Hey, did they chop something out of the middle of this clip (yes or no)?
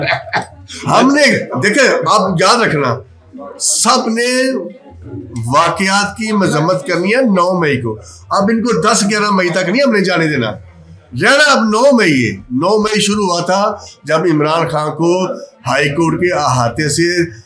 no